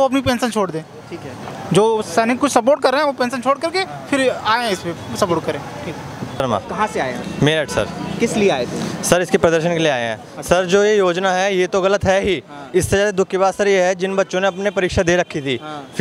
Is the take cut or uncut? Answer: uncut